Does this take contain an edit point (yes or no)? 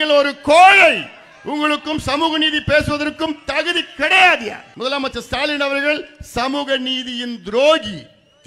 yes